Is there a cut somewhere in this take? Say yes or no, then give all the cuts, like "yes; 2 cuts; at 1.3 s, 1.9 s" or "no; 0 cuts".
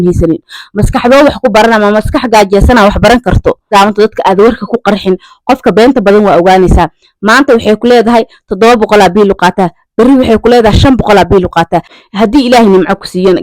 yes; 2 cuts; at 3.7 s, 11.9 s